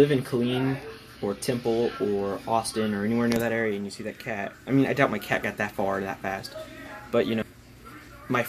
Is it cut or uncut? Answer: cut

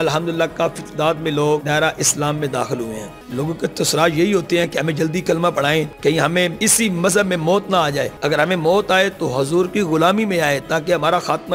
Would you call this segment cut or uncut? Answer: cut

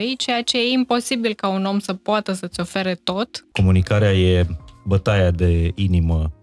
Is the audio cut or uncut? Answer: cut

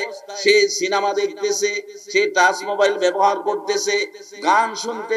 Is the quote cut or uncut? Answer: uncut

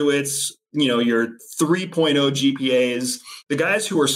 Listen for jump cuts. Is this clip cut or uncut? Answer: cut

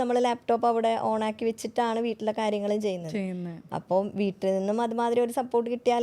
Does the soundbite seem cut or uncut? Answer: uncut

